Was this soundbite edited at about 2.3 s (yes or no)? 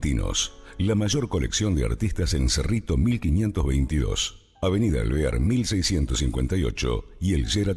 no